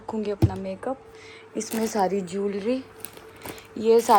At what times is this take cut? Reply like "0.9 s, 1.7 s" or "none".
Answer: none